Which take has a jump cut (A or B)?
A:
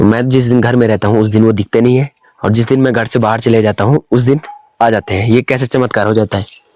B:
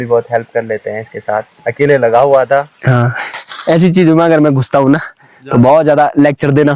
B